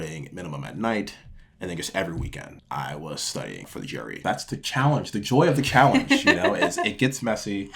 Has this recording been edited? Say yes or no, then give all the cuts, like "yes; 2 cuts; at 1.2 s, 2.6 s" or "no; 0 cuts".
yes; 2 cuts; at 2.5 s, 4.0 s